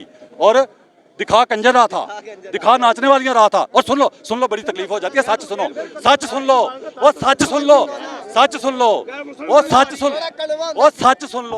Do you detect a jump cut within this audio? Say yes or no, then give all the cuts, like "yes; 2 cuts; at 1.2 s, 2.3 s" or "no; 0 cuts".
no; 0 cuts